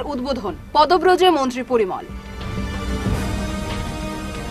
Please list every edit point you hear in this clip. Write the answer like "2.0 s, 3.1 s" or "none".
none